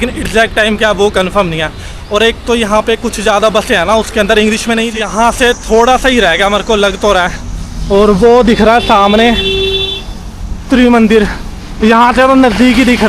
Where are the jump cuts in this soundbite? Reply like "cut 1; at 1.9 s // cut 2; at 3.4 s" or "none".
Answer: cut 1; at 4.9 s